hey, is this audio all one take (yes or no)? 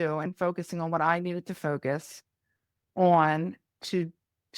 yes